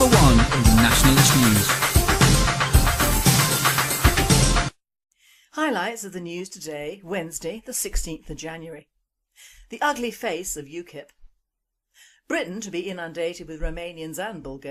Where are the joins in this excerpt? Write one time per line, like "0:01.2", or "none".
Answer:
none